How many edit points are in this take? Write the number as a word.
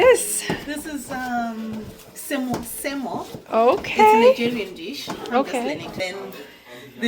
one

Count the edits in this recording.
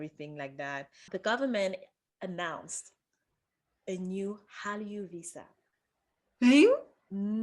one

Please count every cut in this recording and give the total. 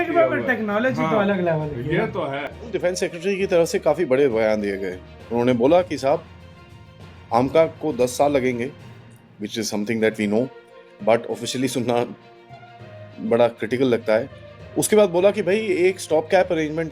one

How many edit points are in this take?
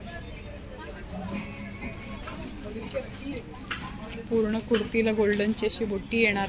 zero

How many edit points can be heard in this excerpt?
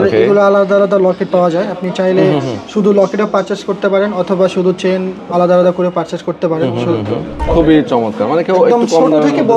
one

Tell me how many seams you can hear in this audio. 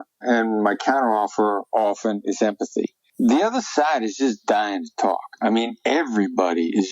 one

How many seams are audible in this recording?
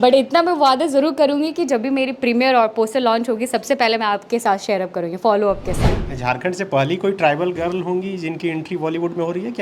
one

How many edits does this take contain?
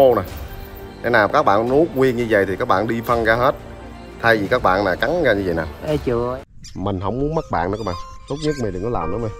one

